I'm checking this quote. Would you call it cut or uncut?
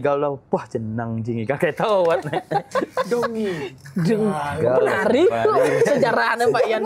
uncut